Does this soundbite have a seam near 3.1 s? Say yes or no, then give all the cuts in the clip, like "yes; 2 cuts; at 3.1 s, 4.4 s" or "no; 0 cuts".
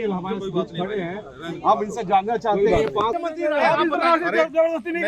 yes; 1 cut; at 3.1 s